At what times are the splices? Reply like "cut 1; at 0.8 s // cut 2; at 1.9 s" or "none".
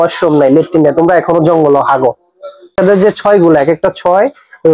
cut 1; at 2.7 s

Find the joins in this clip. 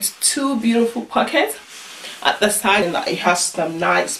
cut 1; at 2.8 s

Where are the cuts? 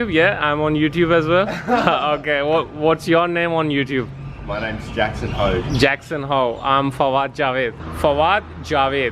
cut 1; at 7.8 s

